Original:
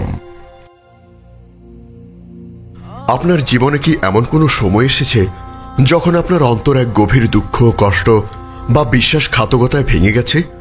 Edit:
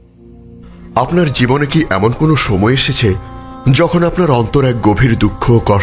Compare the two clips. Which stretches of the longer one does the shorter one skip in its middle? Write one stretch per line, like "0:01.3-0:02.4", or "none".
0:02.4-0:03.1